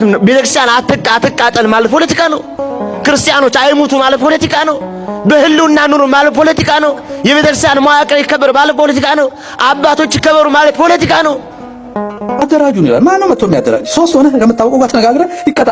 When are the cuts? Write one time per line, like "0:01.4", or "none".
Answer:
0:12.4